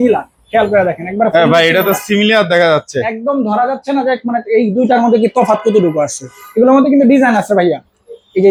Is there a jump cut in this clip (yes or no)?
no